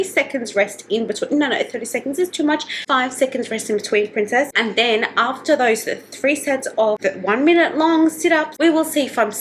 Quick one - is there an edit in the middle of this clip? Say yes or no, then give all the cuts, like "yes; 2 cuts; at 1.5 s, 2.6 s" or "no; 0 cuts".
no; 0 cuts